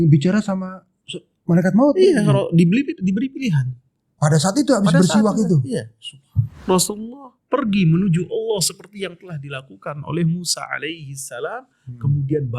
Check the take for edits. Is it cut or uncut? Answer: cut